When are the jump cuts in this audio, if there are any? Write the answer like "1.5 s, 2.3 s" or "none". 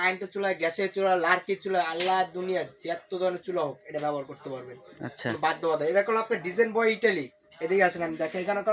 none